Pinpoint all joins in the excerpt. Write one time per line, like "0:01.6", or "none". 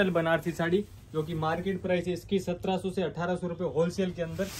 none